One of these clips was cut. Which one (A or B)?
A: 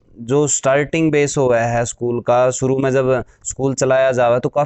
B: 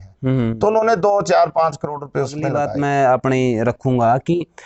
B